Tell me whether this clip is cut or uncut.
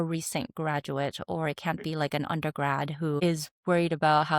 uncut